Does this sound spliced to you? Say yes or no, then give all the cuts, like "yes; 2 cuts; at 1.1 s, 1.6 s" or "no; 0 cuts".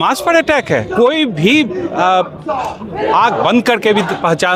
no; 0 cuts